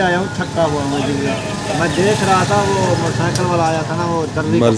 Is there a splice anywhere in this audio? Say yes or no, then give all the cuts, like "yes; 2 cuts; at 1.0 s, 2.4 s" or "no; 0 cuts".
no; 0 cuts